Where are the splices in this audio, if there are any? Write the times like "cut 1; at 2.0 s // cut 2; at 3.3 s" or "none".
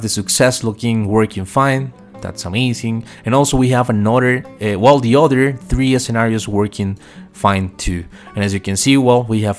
none